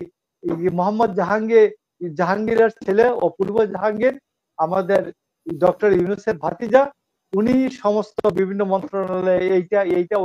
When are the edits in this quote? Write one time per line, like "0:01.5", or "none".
none